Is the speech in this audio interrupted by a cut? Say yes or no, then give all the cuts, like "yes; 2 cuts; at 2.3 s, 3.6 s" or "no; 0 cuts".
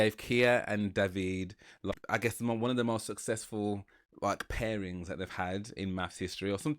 yes; 1 cut; at 1.9 s